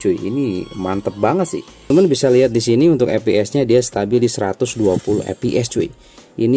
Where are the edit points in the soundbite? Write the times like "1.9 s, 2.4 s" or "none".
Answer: 1.9 s